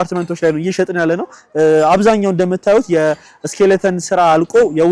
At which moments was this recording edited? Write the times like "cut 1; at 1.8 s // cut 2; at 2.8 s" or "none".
none

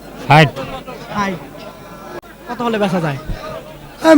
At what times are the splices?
cut 1; at 2.2 s

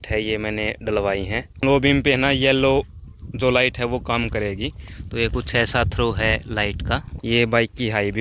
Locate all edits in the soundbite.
cut 1; at 1.6 s // cut 2; at 7.1 s

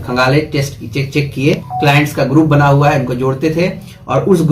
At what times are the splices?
cut 1; at 1.7 s

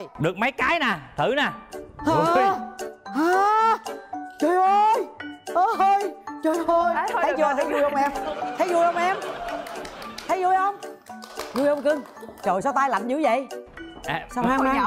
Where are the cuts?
none

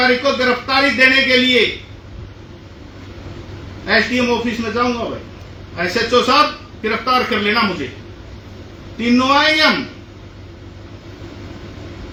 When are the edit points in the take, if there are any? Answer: none

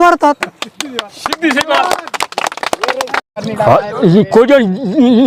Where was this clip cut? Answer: cut 1; at 3.3 s

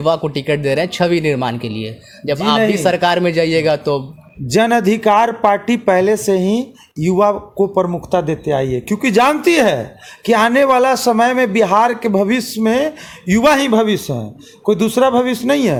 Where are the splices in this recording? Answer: none

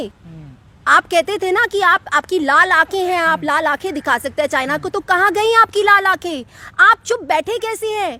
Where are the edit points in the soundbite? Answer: none

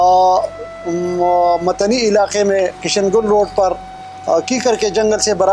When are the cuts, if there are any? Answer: none

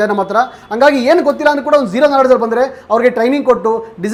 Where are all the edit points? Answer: none

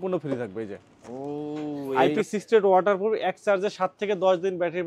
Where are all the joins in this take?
cut 1; at 1.9 s

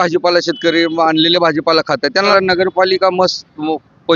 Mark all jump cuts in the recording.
cut 1; at 2.3 s

